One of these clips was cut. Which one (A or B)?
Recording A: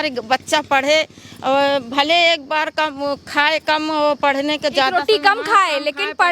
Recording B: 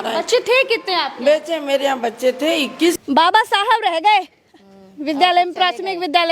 B